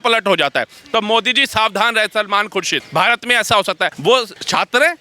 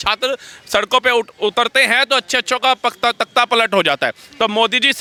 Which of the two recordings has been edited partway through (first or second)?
first